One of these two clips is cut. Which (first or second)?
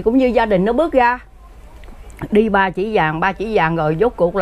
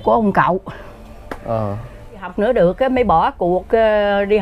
second